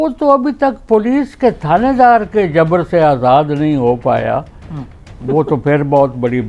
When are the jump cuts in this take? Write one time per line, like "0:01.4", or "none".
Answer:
none

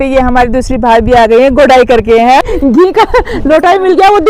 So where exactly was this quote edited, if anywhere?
0:02.4

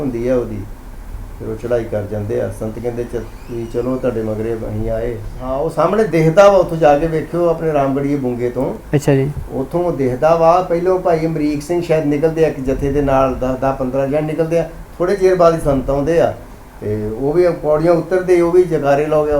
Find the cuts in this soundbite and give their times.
0:05.4

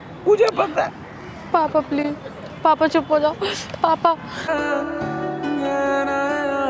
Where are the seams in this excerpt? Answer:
none

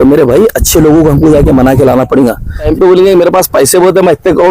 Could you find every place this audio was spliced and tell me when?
0:02.7

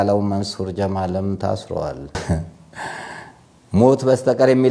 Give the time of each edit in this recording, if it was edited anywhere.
0:02.1

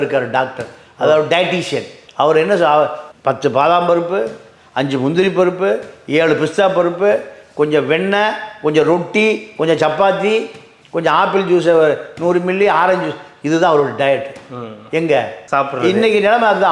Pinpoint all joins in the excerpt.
none

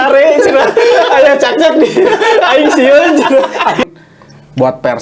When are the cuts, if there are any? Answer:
0:03.8

